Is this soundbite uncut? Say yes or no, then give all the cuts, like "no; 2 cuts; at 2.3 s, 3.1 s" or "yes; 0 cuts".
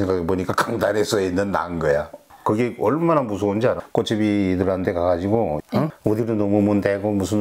no; 3 cuts; at 2.2 s, 3.8 s, 5.6 s